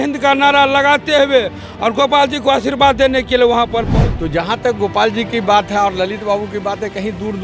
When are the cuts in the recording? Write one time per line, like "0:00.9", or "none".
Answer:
0:04.0